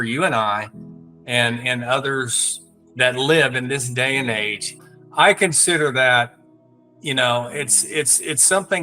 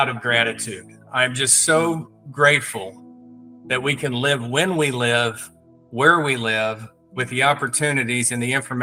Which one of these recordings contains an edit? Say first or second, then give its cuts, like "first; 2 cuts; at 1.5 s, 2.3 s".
first; 1 cut; at 4.8 s